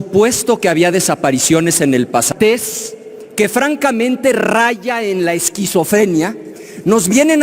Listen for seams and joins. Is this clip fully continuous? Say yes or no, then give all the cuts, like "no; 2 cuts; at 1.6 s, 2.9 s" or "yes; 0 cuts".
no; 1 cut; at 2.3 s